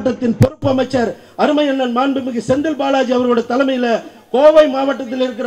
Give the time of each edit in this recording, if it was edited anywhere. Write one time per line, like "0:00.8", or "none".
none